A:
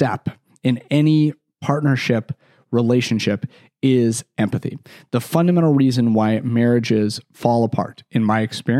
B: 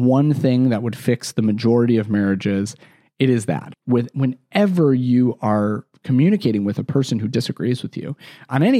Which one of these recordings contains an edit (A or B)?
B